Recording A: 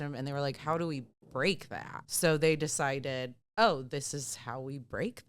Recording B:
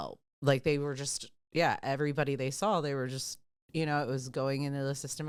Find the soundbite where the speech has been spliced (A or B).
A